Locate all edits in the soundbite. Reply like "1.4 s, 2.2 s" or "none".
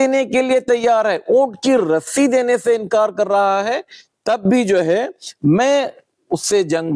none